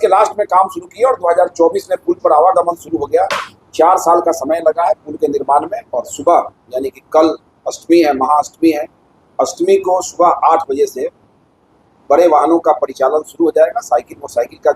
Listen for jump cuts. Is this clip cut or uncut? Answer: cut